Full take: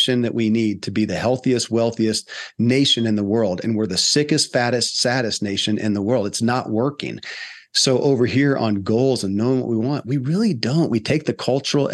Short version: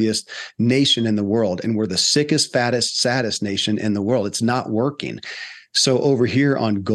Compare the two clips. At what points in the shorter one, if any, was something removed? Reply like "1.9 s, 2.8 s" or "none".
none